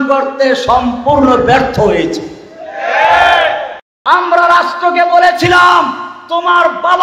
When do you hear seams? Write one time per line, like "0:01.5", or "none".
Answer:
0:03.8